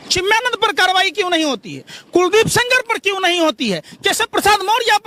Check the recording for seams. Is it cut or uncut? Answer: uncut